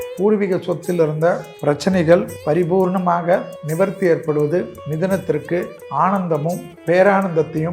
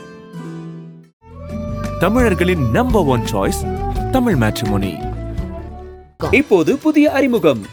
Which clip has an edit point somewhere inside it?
first; 6 cuts; at 1.5 s, 2.3 s, 3.6 s, 4.8 s, 5.8 s, 6.7 s

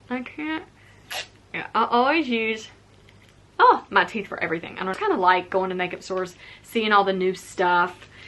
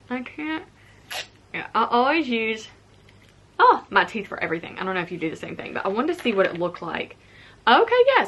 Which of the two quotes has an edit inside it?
first; 1 cut; at 4.9 s

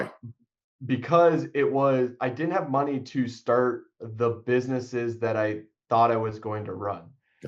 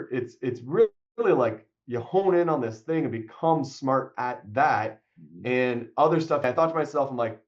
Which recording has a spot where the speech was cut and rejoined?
second; 1 cut; at 6.4 s

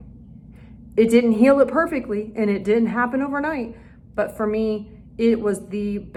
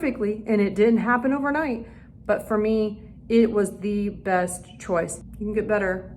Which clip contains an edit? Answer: second; 1 cut; at 5.2 s

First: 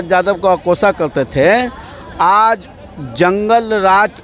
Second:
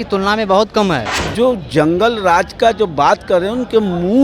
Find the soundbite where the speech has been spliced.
second; 1 cut; at 1.2 s

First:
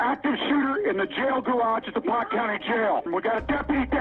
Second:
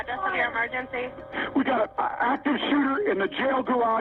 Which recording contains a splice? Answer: first; 1 cut; at 3.1 s

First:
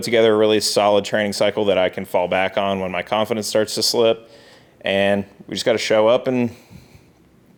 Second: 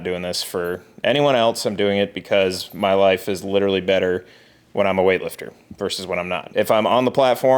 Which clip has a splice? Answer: second; 1 cut; at 6.5 s

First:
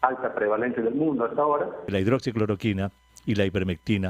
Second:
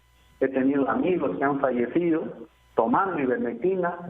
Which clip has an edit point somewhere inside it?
first; 1 cut; at 1.8 s

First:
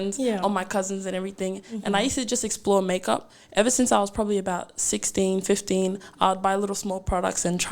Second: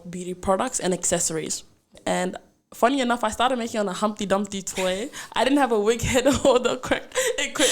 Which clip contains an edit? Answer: second; 1 cut; at 1.9 s

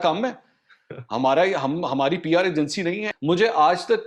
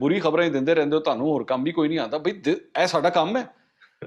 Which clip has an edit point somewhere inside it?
first; 1 cut; at 3.1 s

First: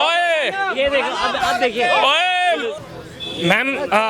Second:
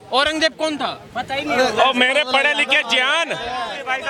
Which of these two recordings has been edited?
first; 1 cut; at 2.8 s

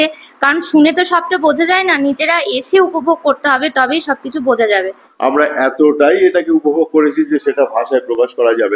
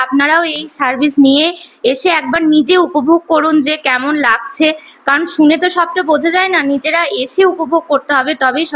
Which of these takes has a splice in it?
first; 1 cut; at 5.0 s

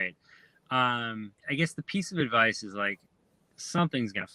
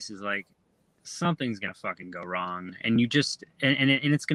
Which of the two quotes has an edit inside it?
first; 1 cut; at 1.4 s

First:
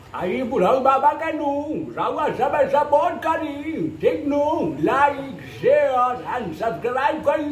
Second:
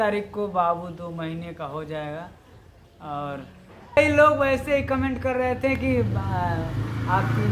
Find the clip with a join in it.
second; 1 cut; at 4.0 s

